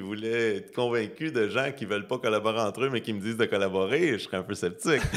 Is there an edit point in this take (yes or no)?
no